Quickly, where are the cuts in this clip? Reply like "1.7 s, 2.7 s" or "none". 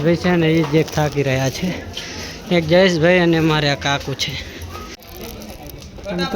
5.0 s